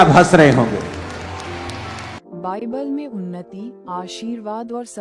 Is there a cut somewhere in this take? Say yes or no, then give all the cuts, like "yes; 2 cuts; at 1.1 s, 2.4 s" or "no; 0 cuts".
no; 0 cuts